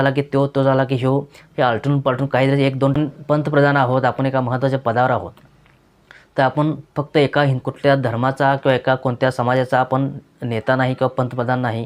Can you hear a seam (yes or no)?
yes